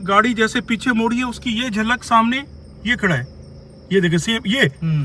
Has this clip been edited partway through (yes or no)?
no